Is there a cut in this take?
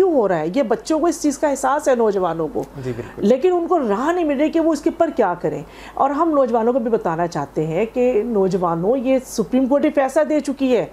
no; 0 cuts

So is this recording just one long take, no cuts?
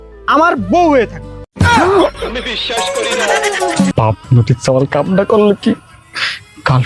no; 1 cut; at 3.9 s

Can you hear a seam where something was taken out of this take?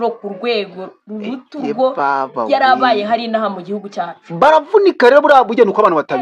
no; 0 cuts

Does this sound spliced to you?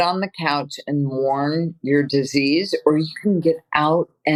no; 0 cuts

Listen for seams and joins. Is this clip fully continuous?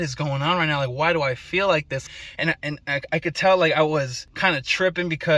no; 2 cuts; at 2.0 s, 4.2 s

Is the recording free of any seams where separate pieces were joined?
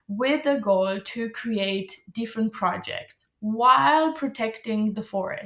yes; 0 cuts

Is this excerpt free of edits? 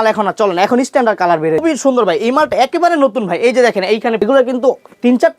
no; 2 cuts; at 1.6 s, 4.2 s

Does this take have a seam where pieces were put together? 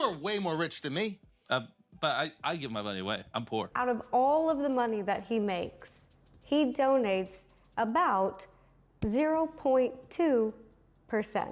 yes; 1 cut; at 3.7 s

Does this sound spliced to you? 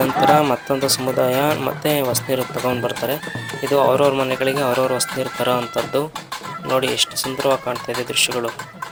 no; 0 cuts

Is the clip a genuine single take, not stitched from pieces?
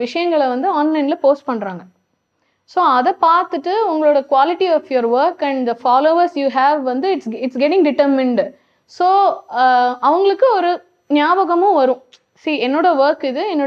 yes; 0 cuts

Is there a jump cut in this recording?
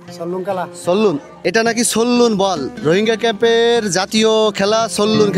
yes; 1 cut; at 1.3 s

